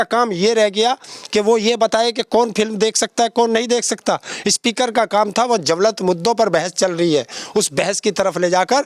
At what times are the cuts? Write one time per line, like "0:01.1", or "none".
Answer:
none

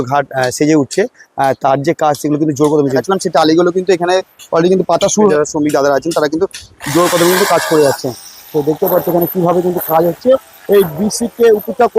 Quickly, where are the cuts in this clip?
0:03.0
0:05.3

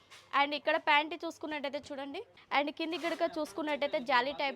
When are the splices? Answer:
0:02.3

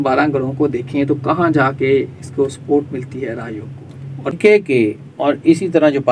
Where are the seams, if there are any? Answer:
0:04.3

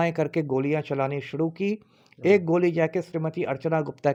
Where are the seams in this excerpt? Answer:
none

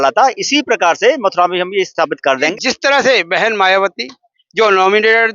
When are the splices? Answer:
0:02.5

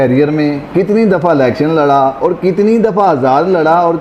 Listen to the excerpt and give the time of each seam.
none

